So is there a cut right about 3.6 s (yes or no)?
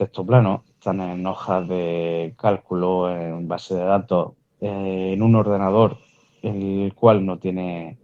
no